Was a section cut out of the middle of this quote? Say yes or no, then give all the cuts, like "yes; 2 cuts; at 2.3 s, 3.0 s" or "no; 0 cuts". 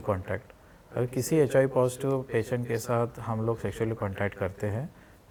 no; 0 cuts